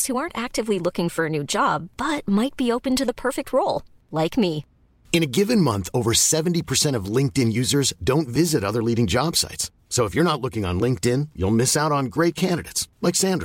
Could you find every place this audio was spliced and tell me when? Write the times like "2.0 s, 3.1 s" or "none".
none